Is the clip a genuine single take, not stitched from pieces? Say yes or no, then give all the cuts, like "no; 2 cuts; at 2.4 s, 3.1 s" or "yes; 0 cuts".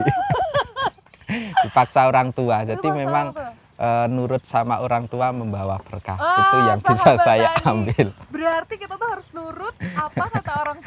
yes; 0 cuts